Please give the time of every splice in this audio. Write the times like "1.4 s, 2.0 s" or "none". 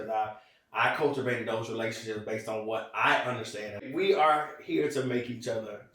3.8 s